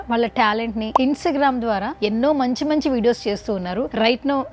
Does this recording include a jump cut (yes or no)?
yes